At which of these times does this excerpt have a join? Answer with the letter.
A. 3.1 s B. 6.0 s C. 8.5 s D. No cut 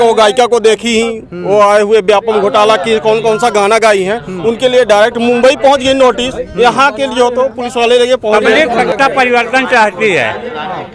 C